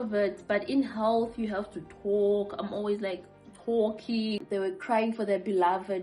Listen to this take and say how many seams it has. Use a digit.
1